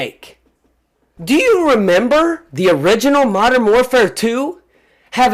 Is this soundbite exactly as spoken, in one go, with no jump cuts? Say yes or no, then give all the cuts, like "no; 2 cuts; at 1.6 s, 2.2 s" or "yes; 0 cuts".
no; 1 cut; at 1.1 s